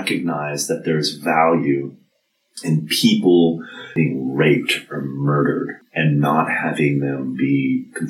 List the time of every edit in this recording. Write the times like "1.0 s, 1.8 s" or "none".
4.0 s, 5.7 s